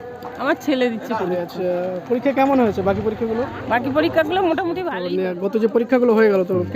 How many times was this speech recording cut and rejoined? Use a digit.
1